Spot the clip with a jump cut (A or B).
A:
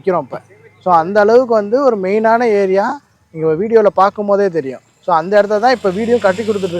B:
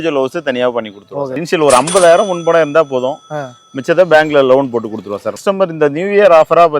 B